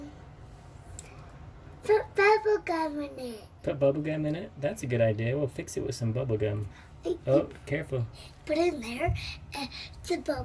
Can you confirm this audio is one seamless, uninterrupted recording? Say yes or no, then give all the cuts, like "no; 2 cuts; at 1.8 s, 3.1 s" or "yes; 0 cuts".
yes; 0 cuts